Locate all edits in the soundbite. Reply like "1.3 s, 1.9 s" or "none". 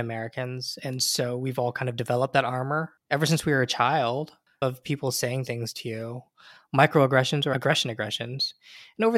2.9 s, 4.5 s, 7.5 s